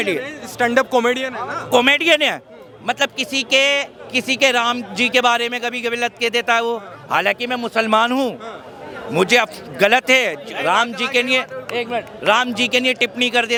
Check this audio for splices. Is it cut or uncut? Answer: uncut